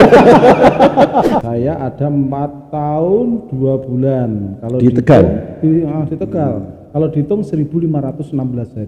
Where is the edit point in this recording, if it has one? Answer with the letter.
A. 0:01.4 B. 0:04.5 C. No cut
A